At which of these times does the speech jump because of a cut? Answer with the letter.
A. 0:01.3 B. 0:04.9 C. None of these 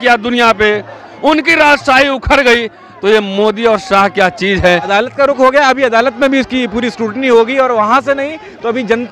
B